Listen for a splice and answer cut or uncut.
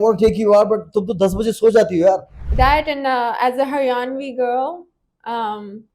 cut